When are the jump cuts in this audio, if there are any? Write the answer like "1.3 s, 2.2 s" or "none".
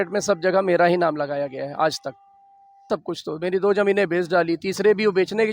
2.9 s